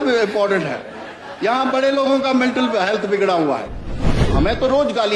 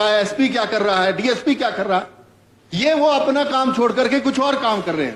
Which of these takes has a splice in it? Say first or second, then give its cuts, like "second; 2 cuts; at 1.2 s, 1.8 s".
first; 1 cut; at 4.3 s